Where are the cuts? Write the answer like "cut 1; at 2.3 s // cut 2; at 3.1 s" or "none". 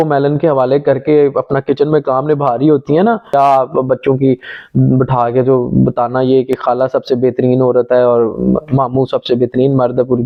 none